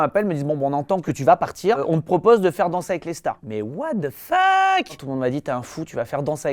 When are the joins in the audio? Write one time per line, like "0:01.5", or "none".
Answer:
0:01.1
0:03.5

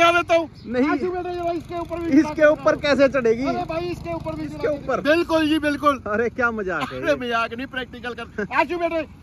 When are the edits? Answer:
0:04.6

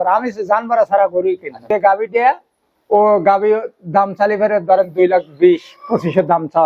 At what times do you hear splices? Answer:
0:01.7

